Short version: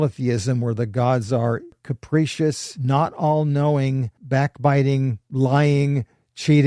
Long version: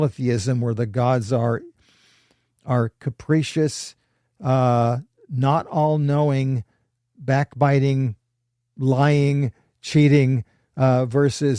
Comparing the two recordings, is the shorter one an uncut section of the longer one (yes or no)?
no